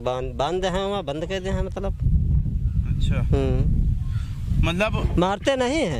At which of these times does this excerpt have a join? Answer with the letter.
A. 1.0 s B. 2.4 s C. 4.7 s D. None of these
D